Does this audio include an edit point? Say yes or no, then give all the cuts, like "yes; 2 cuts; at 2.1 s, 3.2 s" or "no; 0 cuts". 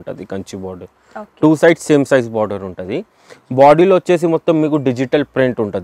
no; 0 cuts